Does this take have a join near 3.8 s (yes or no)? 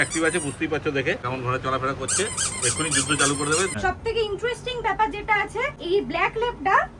yes